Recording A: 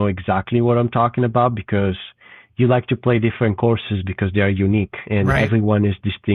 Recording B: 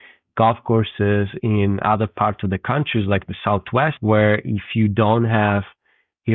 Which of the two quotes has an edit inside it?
B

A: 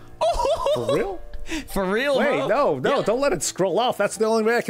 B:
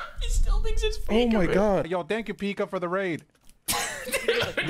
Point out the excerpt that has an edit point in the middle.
B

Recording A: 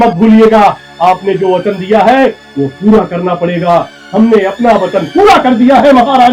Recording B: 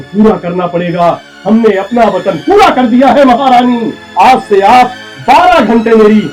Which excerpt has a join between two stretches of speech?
B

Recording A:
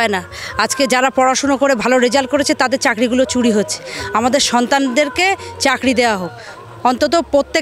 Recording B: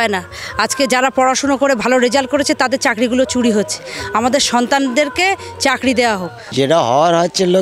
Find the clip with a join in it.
B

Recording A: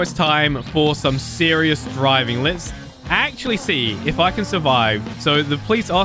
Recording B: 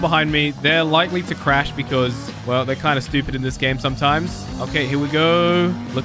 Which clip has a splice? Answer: A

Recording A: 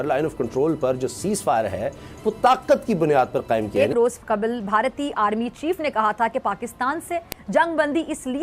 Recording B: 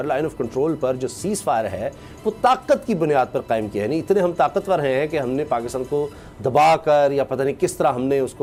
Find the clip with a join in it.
A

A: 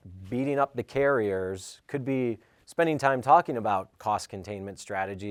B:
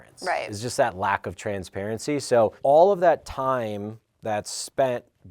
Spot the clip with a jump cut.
B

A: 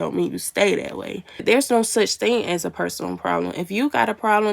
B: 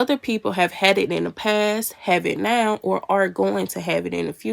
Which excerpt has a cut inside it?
A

